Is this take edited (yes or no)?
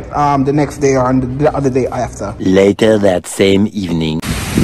yes